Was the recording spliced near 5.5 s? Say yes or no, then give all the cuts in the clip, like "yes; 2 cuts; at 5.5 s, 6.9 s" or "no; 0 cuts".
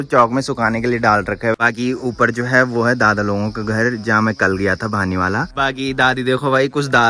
yes; 2 cuts; at 1.6 s, 5.5 s